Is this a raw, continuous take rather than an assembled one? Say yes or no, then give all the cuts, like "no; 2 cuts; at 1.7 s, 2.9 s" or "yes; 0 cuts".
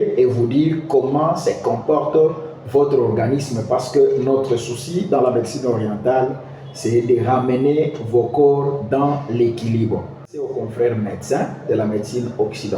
no; 1 cut; at 10.5 s